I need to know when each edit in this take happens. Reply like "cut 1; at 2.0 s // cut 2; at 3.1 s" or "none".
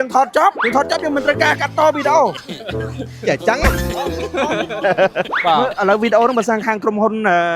cut 1; at 5.3 s